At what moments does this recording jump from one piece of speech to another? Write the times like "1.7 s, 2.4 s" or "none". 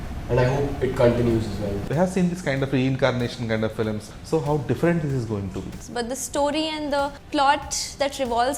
1.8 s, 4.1 s, 5.8 s, 7.2 s